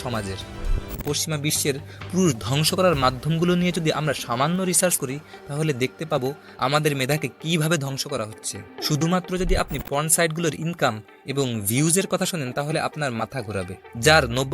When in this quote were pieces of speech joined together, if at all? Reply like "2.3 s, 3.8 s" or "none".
1.0 s